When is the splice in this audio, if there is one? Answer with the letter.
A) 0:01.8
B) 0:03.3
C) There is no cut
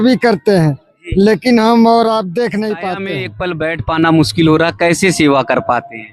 B